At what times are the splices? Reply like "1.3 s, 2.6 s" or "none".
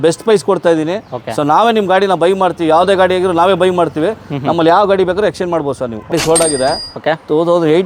6.1 s